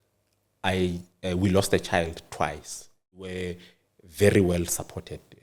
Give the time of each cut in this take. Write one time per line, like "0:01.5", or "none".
0:03.5